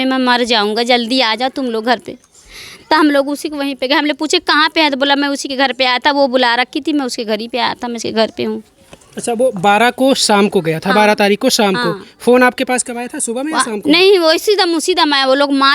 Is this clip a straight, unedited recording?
yes; 0 cuts

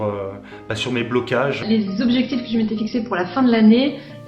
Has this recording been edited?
yes; 1 cut; at 1.6 s

